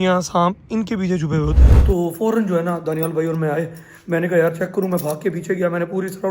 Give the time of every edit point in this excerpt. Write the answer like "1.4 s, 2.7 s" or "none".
1.7 s